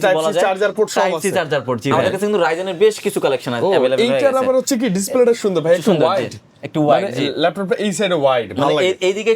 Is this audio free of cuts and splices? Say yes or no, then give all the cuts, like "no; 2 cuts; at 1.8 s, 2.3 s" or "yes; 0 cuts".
no; 1 cut; at 1.9 s